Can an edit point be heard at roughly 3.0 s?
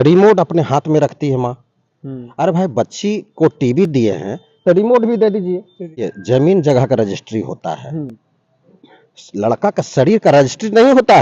no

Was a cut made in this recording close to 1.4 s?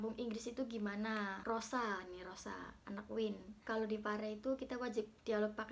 yes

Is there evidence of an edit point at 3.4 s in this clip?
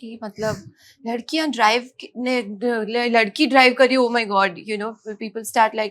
no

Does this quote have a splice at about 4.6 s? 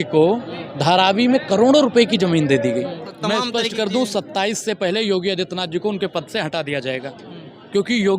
no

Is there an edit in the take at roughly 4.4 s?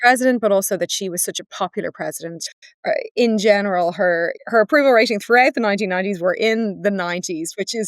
yes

